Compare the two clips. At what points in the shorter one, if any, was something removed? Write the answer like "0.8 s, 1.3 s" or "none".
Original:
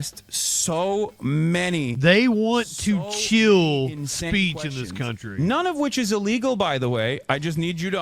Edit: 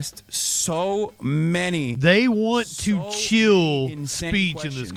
none